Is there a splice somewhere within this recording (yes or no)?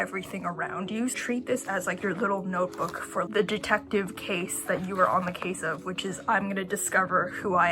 yes